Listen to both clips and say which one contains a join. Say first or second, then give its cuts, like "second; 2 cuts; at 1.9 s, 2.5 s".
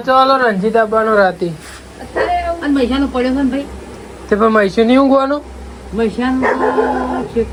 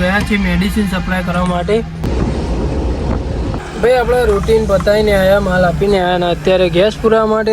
second; 2 cuts; at 2.0 s, 3.6 s